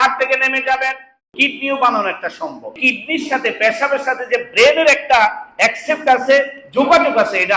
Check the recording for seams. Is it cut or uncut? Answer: cut